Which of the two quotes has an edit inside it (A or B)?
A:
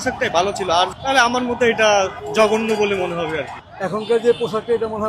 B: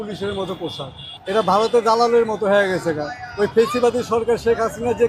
A